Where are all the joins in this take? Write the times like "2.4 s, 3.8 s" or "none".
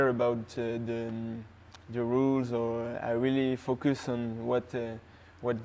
none